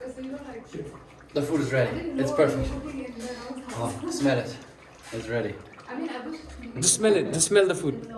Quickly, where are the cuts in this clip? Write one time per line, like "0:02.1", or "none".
none